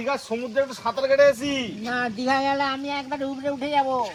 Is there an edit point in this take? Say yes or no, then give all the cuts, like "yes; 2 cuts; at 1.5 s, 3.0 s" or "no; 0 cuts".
no; 0 cuts